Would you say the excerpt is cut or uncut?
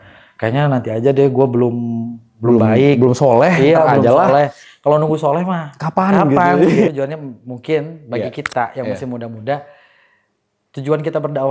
cut